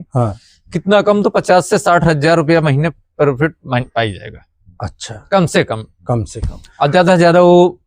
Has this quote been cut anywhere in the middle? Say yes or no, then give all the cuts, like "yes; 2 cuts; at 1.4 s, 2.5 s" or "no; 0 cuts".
no; 0 cuts